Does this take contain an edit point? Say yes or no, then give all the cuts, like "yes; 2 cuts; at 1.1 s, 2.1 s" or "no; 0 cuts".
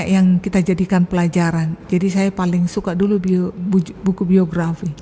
no; 0 cuts